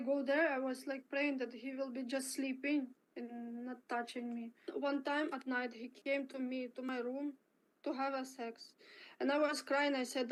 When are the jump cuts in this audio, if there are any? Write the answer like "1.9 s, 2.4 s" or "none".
none